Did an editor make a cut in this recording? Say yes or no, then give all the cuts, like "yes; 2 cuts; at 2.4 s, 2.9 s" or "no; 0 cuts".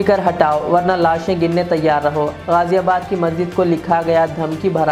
no; 0 cuts